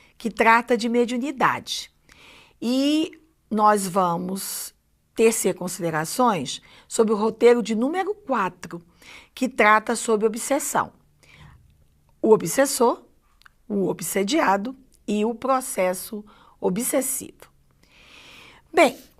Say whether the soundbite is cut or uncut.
cut